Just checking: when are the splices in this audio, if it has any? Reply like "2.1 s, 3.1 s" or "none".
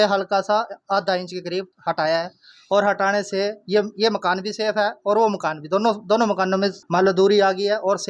none